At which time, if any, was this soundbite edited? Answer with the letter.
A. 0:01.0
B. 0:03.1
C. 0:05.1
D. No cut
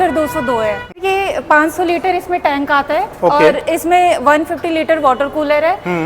A